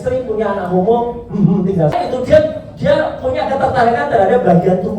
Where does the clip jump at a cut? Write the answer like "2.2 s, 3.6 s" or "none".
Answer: 1.9 s